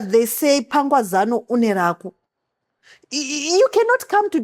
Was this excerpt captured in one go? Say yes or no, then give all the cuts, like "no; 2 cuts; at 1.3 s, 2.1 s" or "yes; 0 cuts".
yes; 0 cuts